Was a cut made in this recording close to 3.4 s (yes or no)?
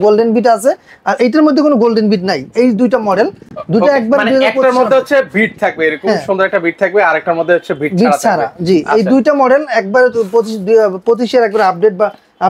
no